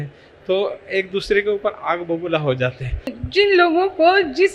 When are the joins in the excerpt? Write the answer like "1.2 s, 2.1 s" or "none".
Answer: 3.2 s